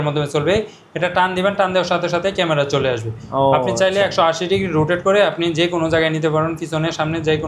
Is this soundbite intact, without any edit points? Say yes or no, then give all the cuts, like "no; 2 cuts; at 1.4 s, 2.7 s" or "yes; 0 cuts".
yes; 0 cuts